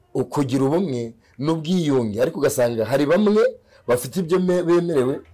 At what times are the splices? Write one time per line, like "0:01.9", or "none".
none

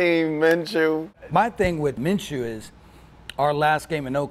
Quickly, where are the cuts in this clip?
0:01.1
0:02.0

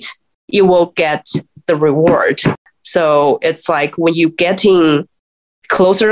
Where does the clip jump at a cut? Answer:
0:02.7

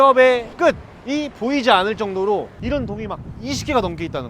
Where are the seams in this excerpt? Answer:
0:02.5

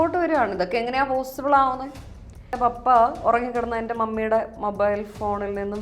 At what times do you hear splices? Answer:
0:02.5

